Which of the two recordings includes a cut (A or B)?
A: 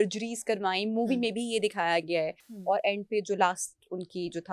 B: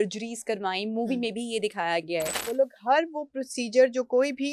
B